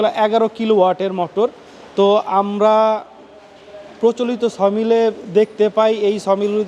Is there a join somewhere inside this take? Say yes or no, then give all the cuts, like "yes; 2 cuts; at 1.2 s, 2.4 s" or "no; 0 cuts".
no; 0 cuts